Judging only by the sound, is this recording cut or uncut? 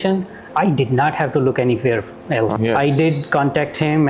cut